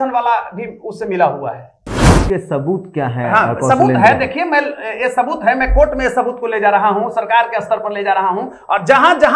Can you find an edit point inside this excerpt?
yes; 1 cut; at 2.2 s

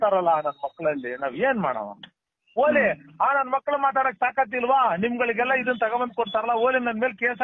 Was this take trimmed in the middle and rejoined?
no; 0 cuts

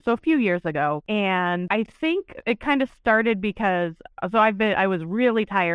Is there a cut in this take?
yes; 2 cuts; at 1.0 s, 1.7 s

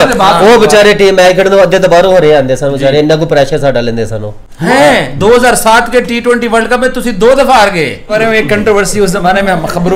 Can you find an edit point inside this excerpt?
yes; 1 cut; at 8.1 s

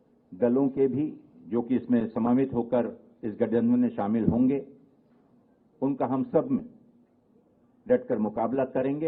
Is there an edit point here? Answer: no; 0 cuts

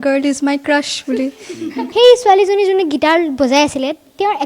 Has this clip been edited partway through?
yes; 1 cut; at 1.8 s

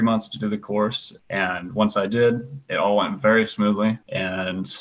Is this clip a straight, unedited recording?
no; 1 cut; at 1.1 s

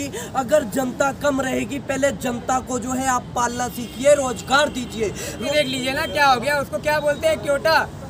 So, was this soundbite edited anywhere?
yes; 1 cut; at 5.4 s

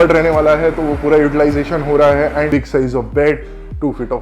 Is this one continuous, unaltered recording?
no; 1 cut; at 2.5 s

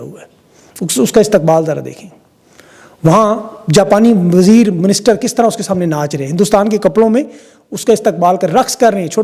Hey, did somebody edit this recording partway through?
no; 0 cuts

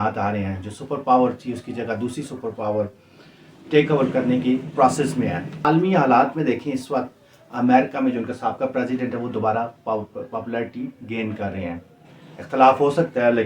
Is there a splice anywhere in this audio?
no; 0 cuts

